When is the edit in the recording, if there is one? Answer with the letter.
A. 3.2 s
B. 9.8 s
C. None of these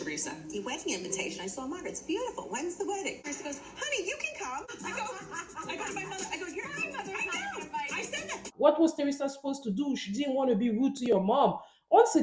A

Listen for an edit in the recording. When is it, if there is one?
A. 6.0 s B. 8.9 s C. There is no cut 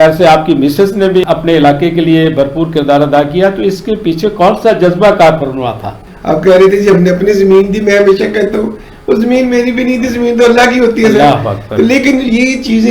A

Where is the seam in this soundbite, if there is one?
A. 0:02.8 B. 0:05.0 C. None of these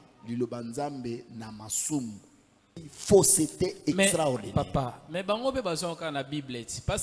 A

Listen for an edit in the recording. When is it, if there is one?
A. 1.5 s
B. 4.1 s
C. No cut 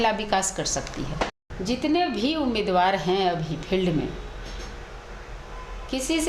A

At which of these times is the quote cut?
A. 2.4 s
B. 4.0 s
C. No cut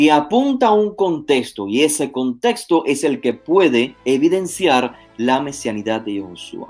B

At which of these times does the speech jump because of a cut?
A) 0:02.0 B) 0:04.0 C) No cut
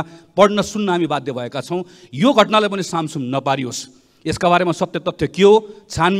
C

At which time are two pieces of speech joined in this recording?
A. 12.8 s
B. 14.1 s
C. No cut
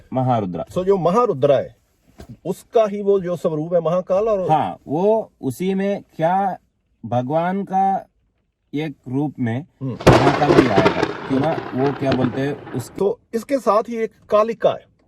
A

